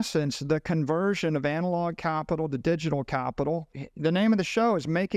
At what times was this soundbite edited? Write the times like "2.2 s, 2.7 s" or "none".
3.8 s